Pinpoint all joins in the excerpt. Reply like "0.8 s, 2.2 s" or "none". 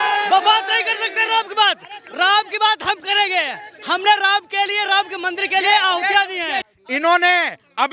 6.7 s